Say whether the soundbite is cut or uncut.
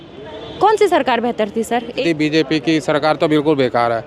cut